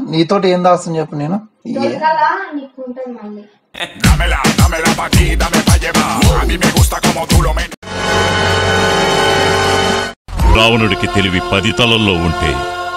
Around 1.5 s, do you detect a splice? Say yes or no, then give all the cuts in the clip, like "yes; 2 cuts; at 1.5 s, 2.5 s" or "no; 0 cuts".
yes; 2 cuts; at 1.5 s, 3.6 s